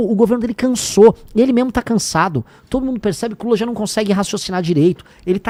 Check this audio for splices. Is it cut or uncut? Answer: uncut